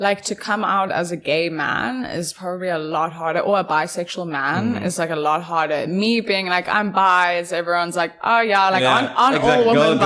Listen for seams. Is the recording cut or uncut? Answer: uncut